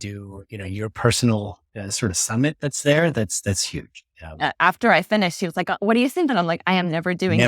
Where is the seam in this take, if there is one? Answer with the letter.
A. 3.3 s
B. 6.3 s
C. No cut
B